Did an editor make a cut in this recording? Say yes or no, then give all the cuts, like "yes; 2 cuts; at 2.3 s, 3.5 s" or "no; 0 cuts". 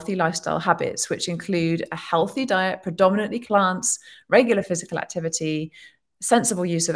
yes; 1 cut; at 3.4 s